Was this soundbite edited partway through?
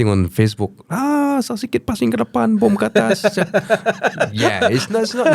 no; 0 cuts

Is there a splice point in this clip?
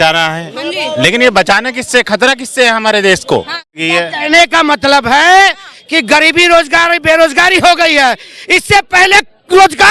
yes; 1 cut; at 3.7 s

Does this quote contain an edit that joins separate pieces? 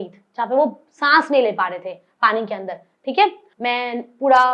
yes; 1 cut; at 3.5 s

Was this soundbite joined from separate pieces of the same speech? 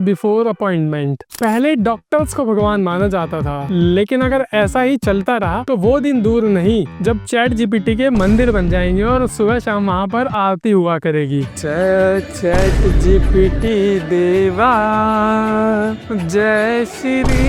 no; 0 cuts

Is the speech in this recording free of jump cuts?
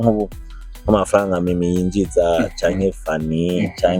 yes; 0 cuts

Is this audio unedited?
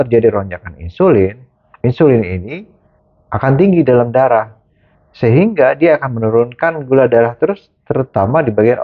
yes; 0 cuts

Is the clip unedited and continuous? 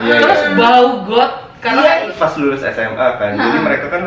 no; 1 cut; at 2.1 s

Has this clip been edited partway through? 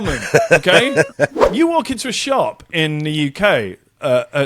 yes; 1 cut; at 1.4 s

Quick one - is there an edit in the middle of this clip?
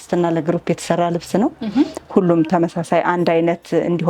no; 0 cuts

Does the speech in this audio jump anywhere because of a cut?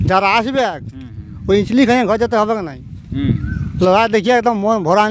no; 0 cuts

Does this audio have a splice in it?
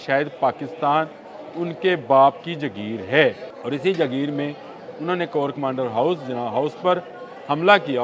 yes; 1 cut; at 3.5 s

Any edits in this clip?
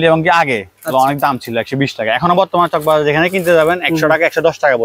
no; 0 cuts

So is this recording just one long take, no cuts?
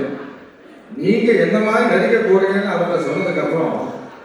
yes; 0 cuts

